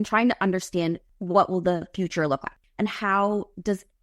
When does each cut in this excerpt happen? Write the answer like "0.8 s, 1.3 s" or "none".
1.1 s, 2.6 s

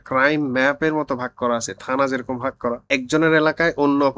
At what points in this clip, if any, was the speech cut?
2.8 s

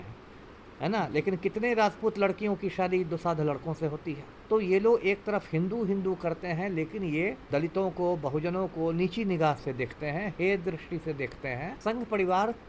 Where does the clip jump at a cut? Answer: 4.3 s, 7.4 s, 11.7 s

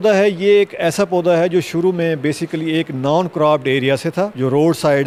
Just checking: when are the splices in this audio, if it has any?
none

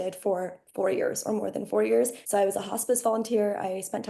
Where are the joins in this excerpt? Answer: 2.2 s

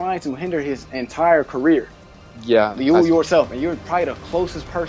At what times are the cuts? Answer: none

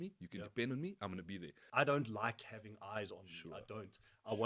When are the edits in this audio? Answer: 1.6 s

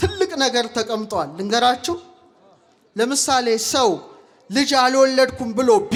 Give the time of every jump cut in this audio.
none

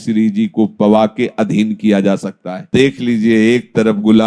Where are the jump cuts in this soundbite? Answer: 2.6 s

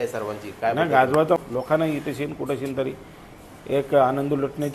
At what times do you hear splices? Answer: 1.4 s

